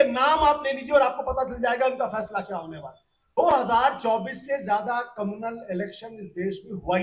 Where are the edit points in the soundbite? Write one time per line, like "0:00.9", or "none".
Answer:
0:03.4